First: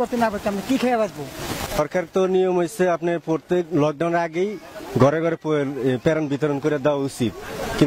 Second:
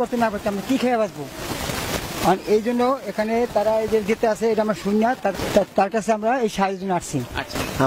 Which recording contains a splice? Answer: first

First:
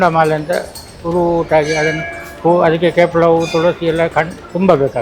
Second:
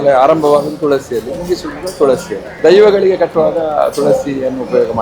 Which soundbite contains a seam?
second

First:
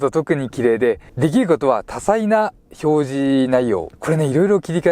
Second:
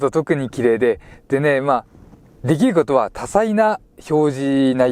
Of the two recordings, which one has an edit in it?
first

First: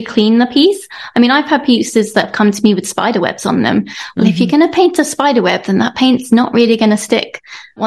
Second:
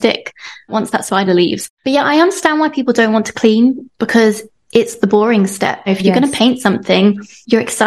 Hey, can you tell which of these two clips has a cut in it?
second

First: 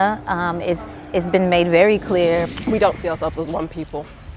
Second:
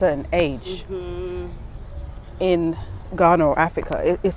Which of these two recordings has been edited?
first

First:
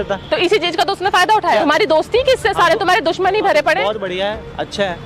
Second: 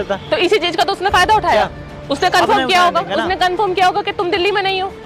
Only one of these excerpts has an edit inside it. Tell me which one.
first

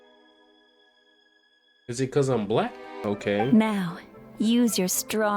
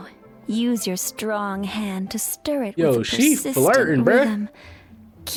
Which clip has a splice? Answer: first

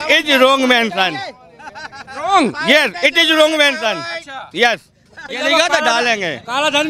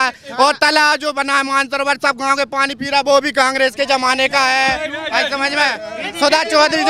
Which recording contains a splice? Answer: first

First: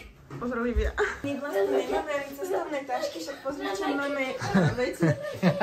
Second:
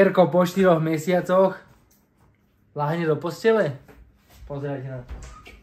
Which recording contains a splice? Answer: first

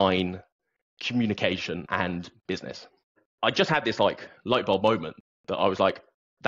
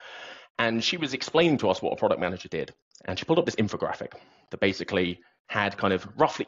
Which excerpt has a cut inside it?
first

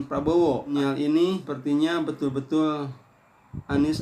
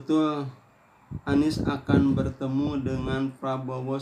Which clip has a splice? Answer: first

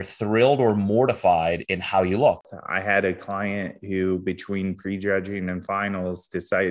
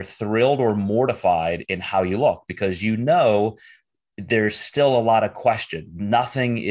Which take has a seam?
first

